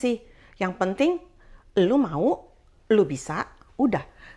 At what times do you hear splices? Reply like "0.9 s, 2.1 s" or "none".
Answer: none